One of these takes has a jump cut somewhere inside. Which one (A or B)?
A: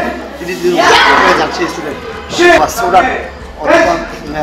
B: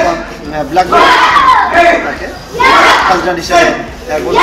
A